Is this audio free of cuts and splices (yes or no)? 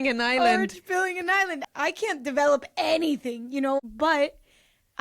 no